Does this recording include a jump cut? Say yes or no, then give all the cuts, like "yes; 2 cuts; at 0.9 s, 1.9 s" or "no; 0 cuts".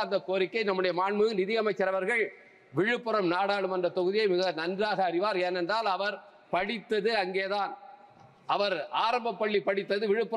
no; 0 cuts